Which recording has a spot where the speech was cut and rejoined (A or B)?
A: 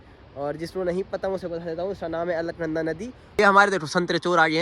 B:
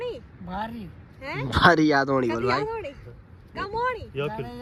A